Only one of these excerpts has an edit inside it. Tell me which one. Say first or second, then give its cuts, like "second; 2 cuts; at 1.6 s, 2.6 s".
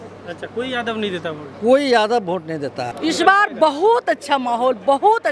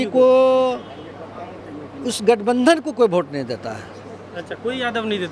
first; 1 cut; at 2.9 s